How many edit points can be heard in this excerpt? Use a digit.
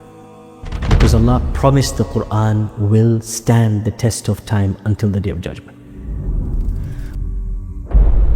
1